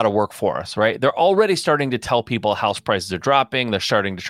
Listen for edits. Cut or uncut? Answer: uncut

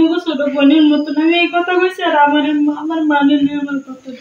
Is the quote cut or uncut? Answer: uncut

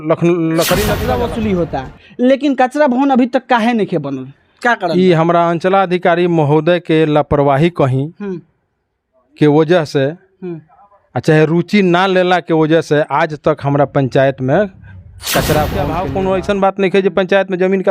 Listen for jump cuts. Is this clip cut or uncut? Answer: cut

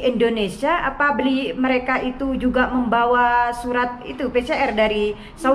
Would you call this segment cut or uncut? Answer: uncut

